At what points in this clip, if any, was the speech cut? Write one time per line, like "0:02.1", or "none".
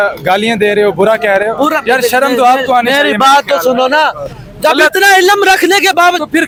none